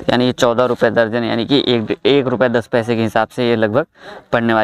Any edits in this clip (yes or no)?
no